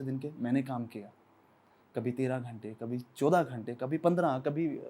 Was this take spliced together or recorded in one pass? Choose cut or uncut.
uncut